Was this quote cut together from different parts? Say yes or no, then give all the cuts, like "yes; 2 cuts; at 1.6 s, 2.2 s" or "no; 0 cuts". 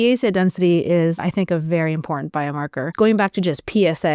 yes; 2 cuts; at 1.2 s, 2.9 s